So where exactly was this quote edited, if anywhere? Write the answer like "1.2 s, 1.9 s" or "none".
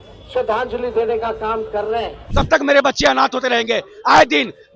2.2 s